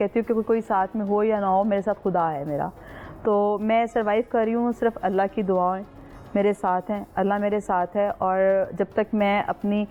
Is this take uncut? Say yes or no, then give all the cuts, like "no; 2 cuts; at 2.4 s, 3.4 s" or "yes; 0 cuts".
yes; 0 cuts